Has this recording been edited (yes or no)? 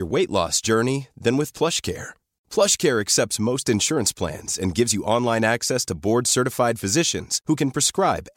no